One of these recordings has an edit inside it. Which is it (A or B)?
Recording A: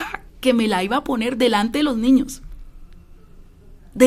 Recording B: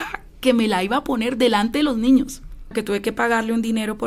B